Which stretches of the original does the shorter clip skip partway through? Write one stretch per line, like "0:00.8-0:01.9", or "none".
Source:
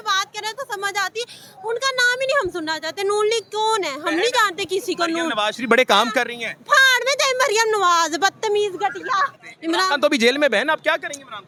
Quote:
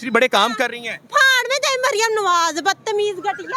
none